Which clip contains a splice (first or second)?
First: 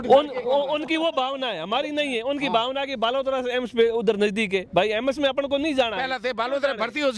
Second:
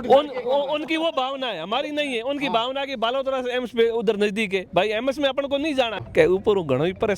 second